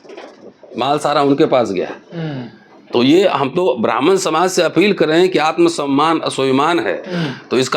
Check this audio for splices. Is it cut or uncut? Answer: uncut